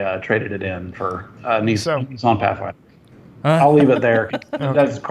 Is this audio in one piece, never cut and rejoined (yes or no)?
no